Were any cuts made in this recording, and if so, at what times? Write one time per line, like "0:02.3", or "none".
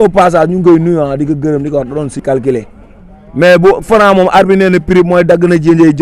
0:02.2